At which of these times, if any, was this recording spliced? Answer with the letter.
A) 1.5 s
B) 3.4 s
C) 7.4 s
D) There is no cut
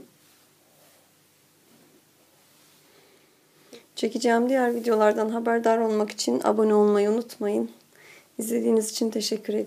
B